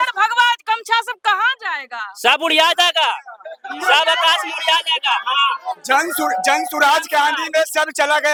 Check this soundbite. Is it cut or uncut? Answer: uncut